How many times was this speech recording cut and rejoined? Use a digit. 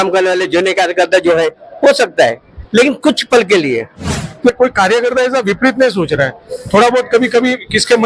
1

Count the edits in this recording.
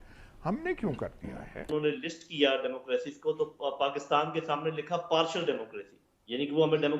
1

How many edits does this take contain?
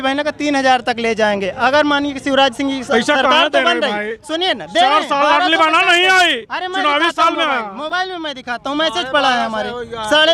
0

